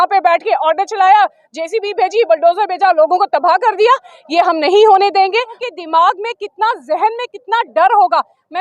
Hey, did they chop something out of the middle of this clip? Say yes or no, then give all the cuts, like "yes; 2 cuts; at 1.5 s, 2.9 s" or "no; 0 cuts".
yes; 1 cut; at 5.5 s